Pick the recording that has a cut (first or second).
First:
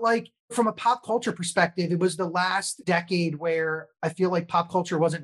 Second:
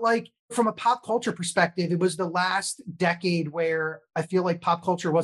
first